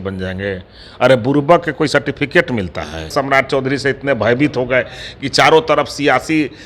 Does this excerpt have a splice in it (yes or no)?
yes